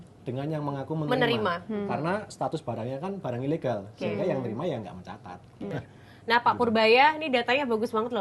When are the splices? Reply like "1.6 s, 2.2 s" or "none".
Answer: 5.7 s